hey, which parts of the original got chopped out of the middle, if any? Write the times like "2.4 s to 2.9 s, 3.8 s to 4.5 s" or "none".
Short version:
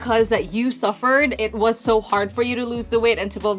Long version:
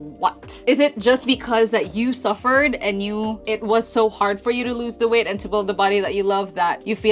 2.8 s to 3.4 s

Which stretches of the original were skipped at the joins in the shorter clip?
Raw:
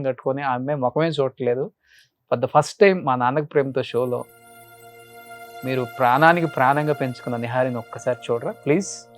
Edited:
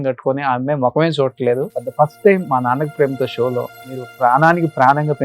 1.8 s to 2.4 s, 4.6 s to 5.8 s

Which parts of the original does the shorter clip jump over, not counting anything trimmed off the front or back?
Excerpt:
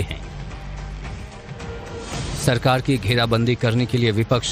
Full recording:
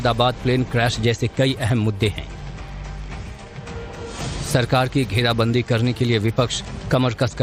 none

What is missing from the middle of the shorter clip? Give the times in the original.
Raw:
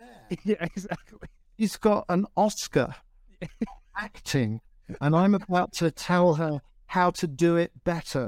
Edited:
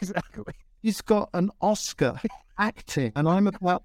3.4 s to 4.5 s

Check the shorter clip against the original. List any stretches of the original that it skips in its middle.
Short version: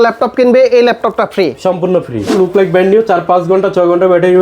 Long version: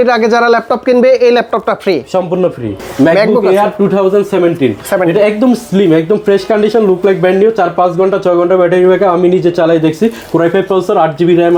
2.8 s to 6.8 s

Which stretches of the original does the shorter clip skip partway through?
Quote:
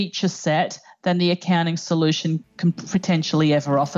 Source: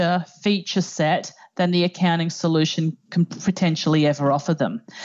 none

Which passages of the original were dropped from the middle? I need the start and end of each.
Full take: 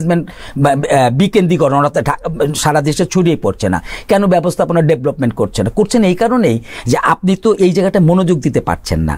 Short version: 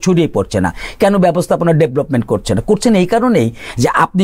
none

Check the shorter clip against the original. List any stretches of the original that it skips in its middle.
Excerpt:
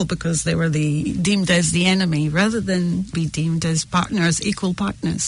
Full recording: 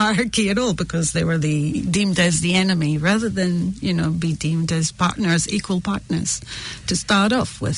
3.8 s to 4.2 s

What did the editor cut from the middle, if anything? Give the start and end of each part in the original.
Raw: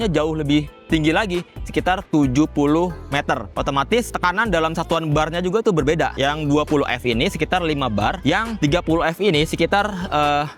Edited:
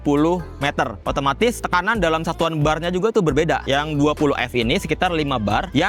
none

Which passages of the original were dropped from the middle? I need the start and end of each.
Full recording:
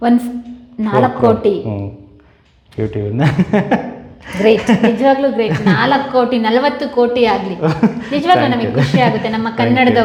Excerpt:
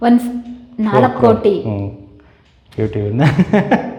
none

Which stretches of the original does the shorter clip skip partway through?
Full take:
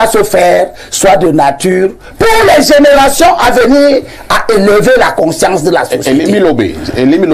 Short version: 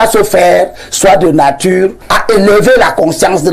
2.0 s to 4.2 s

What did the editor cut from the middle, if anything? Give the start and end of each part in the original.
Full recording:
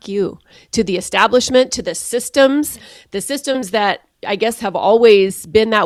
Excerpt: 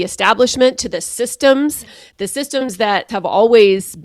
4.0 s to 4.6 s

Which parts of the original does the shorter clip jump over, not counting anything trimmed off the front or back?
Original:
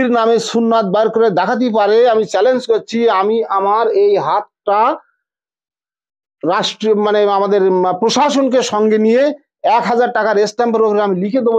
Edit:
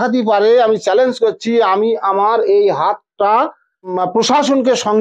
5.4 s to 7.8 s

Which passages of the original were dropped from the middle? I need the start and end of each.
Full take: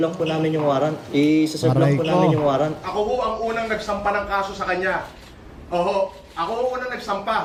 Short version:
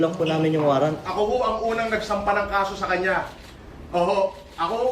0.9 s to 2.7 s

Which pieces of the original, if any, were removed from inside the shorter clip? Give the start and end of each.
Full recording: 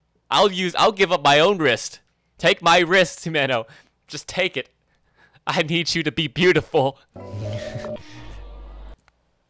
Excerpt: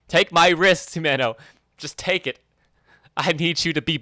none

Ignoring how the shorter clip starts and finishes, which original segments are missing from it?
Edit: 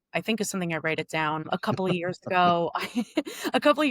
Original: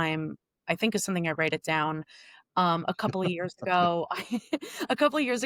2.0 s to 2.8 s

